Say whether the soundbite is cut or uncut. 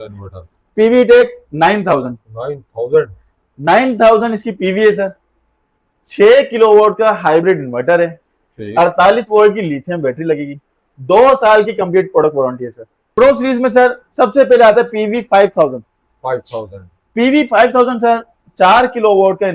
cut